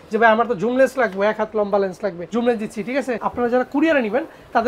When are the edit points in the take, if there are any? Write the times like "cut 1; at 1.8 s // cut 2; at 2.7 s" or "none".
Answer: cut 1; at 3.1 s